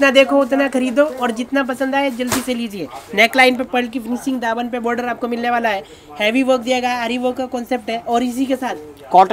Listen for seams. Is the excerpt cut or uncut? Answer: uncut